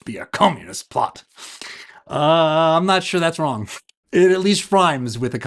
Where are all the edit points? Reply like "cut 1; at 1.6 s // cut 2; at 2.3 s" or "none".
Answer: none